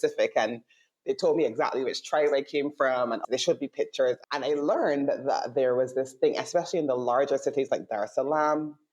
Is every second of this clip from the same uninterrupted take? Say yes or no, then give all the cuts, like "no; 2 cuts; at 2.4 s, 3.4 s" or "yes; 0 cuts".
no; 2 cuts; at 3.2 s, 4.2 s